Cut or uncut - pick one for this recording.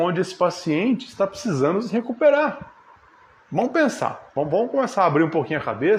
uncut